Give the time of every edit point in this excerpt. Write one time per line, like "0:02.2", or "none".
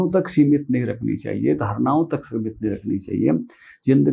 none